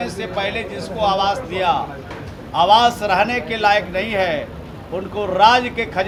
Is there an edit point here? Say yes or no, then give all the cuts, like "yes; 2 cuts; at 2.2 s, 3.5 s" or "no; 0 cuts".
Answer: no; 0 cuts